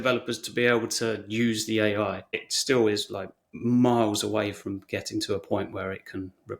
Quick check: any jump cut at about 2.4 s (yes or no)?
yes